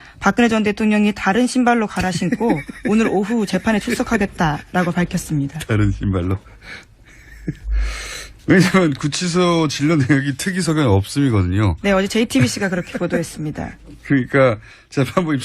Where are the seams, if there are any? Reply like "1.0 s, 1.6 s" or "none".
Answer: 7.9 s